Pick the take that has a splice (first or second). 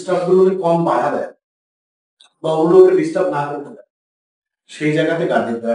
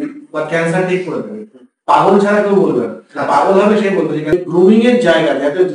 second